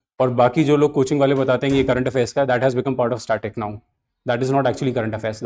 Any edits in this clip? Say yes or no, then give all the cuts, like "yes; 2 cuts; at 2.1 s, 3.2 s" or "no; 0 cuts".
no; 0 cuts